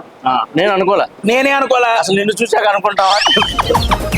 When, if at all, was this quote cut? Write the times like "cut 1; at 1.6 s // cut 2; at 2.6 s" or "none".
cut 1; at 1.1 s